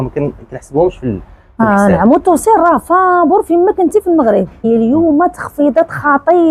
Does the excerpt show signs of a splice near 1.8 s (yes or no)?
no